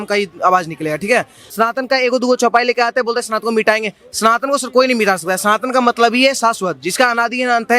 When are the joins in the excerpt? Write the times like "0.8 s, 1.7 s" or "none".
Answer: 1.4 s